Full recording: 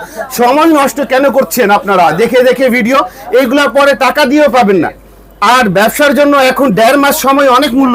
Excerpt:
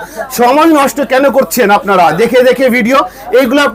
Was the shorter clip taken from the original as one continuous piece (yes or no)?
yes